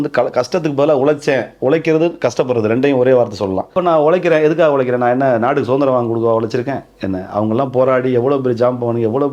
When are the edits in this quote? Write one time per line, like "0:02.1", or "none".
0:03.7